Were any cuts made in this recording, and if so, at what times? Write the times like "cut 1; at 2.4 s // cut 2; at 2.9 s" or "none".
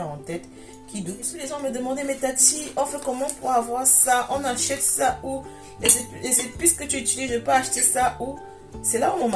cut 1; at 1.3 s